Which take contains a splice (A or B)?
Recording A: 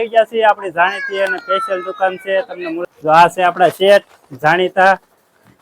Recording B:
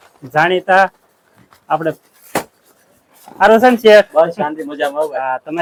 A